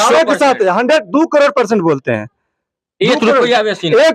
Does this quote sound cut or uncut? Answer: uncut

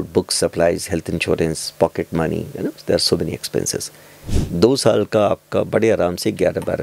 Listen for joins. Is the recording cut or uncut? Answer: cut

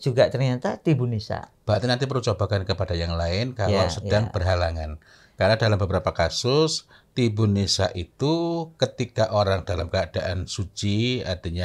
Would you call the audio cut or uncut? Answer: uncut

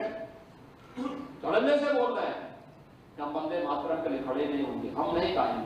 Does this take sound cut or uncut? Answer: uncut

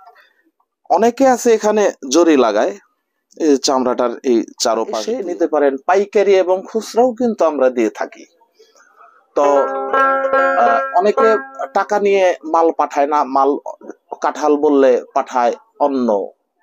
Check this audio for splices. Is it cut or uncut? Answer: cut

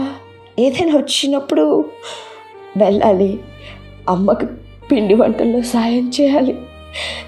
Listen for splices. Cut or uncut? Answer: uncut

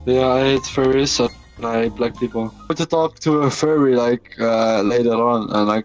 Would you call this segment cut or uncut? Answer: cut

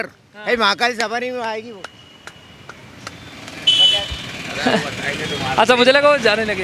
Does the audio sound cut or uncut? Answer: uncut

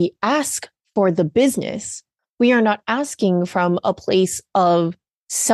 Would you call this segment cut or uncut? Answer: uncut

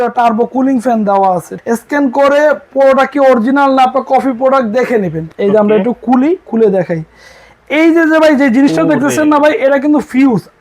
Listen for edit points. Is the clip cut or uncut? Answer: cut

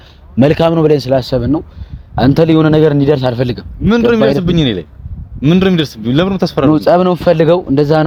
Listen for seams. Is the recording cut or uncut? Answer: uncut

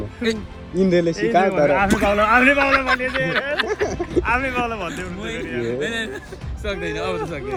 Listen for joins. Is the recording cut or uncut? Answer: uncut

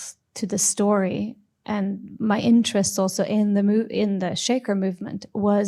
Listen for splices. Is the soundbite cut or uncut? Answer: uncut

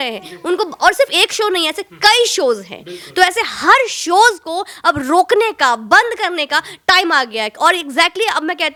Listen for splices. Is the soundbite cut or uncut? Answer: uncut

